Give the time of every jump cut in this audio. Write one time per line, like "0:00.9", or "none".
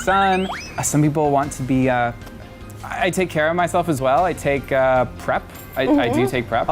none